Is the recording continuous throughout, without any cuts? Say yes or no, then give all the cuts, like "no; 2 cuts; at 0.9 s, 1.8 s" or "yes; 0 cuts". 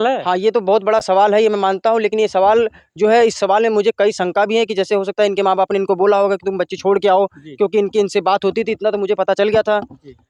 yes; 0 cuts